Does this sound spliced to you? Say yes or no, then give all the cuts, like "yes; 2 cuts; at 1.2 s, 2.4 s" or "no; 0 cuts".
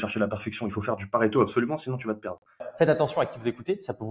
yes; 1 cut; at 2.7 s